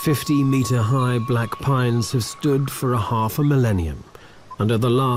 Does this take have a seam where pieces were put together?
no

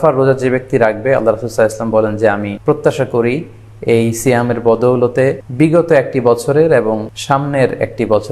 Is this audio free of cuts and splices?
no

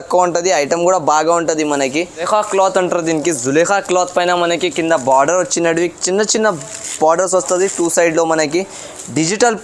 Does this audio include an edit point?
yes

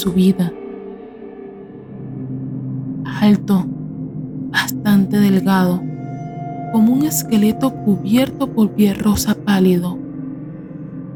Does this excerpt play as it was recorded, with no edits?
yes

